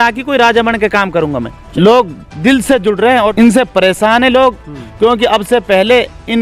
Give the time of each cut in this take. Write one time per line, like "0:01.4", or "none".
0:01.7
0:03.3